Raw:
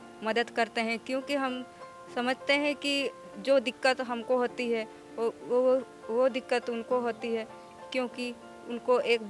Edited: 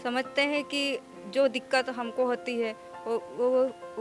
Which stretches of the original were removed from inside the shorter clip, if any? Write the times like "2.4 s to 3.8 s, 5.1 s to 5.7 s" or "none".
none